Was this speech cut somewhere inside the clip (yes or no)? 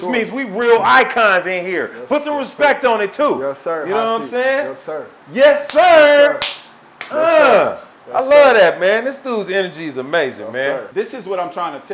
yes